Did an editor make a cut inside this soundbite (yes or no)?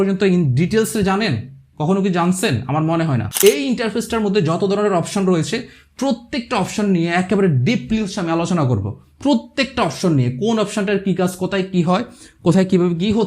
yes